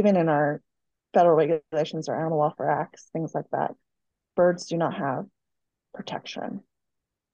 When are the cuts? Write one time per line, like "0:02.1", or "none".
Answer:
none